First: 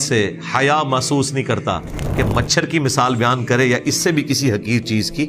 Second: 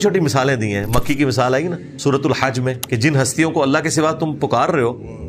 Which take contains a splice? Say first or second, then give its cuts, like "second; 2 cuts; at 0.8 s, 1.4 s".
second; 2 cuts; at 1.9 s, 2.8 s